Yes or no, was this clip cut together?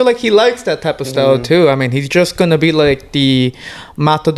no